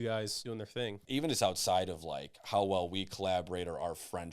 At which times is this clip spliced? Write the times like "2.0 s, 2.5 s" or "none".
1.0 s